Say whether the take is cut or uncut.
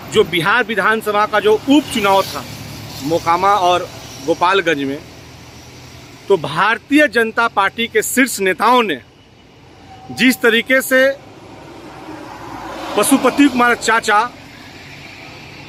uncut